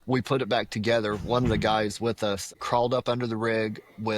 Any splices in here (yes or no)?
yes